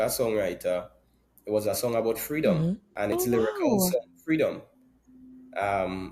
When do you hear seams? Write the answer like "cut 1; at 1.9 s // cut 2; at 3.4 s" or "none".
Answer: cut 1; at 3.0 s